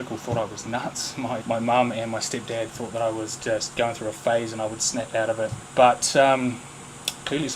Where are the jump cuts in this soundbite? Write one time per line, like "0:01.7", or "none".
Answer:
0:01.4

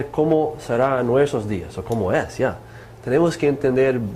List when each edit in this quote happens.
0:02.2

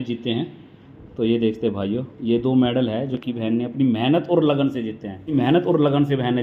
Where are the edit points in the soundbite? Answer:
0:05.3

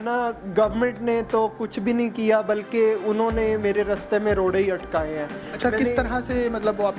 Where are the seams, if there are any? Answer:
none

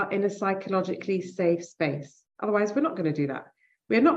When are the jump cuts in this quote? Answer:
none

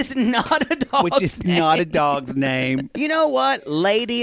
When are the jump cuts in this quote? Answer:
0:03.0

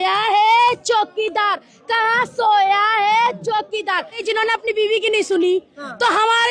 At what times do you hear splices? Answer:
0:04.2

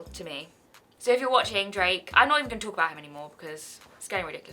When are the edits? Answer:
0:00.9

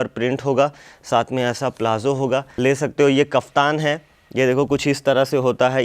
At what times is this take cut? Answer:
0:02.5

